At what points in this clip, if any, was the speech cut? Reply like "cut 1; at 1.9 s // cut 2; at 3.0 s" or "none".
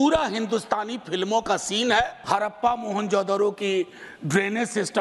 cut 1; at 2.2 s